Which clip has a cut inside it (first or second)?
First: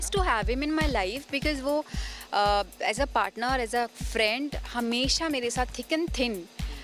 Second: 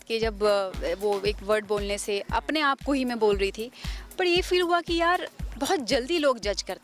second